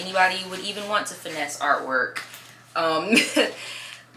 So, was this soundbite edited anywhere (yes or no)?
no